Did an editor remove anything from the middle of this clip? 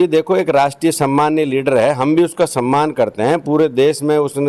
no; 0 cuts

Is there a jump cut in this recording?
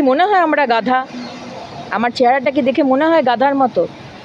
no; 0 cuts

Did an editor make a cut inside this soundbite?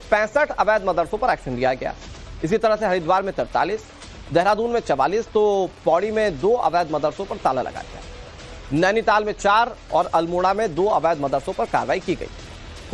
no; 0 cuts

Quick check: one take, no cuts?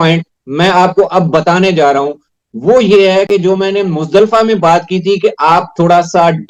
yes; 0 cuts

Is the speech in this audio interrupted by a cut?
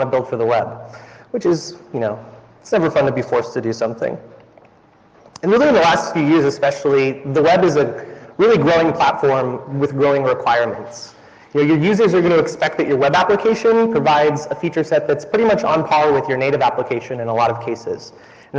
yes; 1 cut; at 13.2 s

